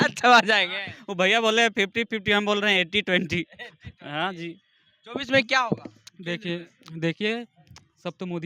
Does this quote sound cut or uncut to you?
uncut